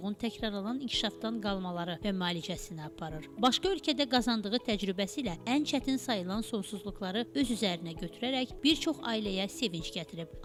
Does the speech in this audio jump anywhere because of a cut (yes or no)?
no